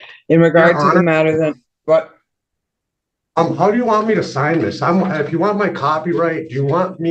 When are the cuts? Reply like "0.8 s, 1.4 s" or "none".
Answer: none